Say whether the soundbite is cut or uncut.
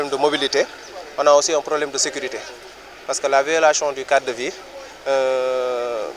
uncut